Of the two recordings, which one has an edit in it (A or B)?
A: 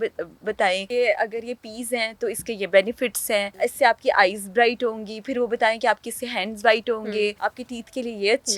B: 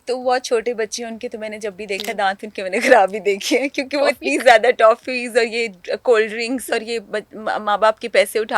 A